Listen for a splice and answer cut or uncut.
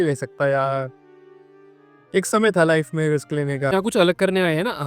cut